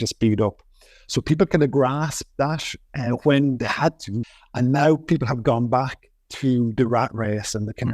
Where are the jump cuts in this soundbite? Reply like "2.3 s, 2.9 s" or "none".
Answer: 4.2 s